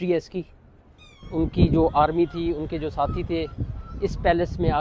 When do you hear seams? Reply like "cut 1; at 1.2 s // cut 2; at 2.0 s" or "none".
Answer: cut 1; at 1.2 s